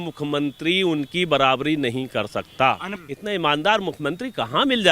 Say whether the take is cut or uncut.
cut